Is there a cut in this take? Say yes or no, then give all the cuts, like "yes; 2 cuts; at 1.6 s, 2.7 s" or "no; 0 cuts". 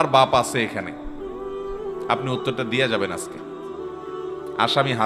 no; 0 cuts